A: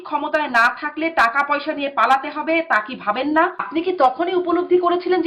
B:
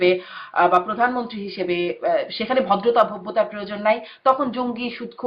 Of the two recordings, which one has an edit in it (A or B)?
A